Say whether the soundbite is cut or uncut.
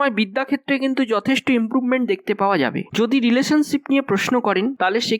cut